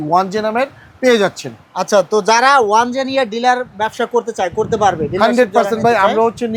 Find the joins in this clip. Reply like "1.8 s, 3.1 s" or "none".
none